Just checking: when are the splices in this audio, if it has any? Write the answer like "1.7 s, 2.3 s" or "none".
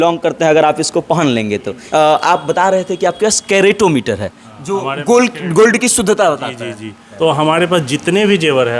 1.8 s, 7.1 s